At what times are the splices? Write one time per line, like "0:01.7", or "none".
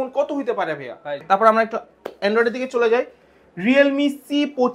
0:01.2